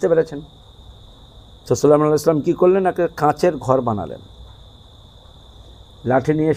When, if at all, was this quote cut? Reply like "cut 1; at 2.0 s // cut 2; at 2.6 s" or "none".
none